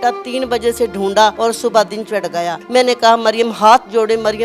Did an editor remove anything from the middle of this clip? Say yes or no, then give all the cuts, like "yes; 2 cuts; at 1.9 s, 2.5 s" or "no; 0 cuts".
yes; 2 cuts; at 1.4 s, 2.6 s